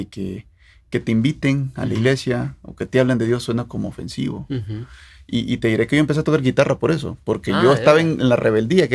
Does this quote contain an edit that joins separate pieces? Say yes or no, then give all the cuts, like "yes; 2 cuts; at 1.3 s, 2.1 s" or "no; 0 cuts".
no; 0 cuts